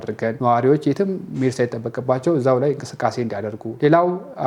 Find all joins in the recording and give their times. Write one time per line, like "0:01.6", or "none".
none